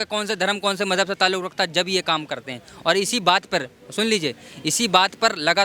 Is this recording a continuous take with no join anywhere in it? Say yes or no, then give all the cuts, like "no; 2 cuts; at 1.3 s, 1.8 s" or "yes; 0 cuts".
yes; 0 cuts